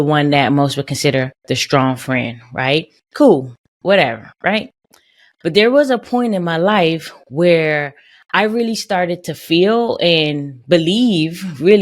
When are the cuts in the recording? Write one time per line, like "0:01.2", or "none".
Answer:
0:05.3